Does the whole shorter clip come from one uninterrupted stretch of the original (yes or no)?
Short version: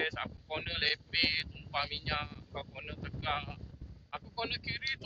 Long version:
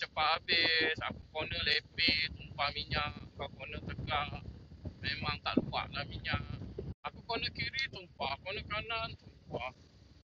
no